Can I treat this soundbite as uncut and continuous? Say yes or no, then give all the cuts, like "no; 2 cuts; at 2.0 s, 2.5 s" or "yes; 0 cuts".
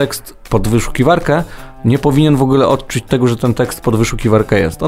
yes; 0 cuts